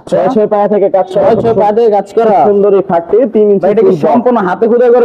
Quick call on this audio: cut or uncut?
uncut